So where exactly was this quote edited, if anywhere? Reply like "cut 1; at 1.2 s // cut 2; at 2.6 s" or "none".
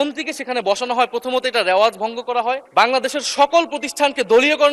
cut 1; at 2.6 s